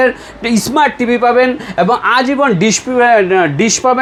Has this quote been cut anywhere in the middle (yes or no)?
no